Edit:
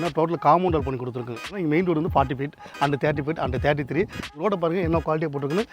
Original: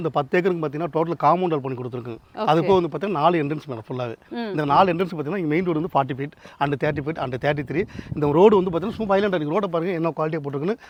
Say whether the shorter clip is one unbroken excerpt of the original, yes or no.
no